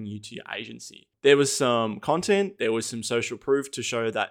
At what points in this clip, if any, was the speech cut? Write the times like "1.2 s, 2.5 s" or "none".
1.1 s